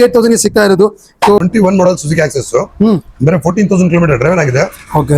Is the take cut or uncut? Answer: cut